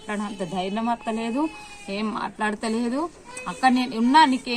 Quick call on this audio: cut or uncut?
uncut